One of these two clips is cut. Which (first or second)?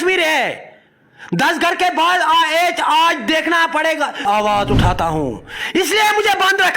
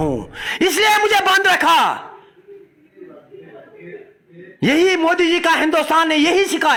first